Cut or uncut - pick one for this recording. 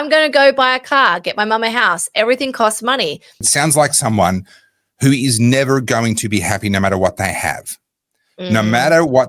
cut